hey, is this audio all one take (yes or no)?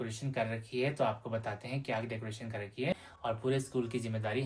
no